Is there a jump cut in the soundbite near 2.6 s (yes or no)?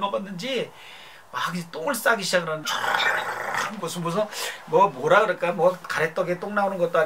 yes